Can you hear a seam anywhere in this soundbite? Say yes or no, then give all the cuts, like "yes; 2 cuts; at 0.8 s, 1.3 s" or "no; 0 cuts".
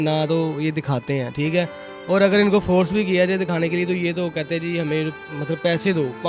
no; 0 cuts